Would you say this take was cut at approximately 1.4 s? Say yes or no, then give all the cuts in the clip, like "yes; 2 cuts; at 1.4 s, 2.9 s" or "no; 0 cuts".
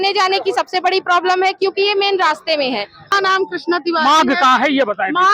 no; 1 cut; at 3.0 s